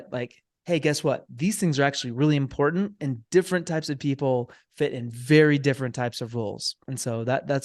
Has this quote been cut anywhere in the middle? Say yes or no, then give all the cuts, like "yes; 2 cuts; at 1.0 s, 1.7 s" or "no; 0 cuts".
no; 0 cuts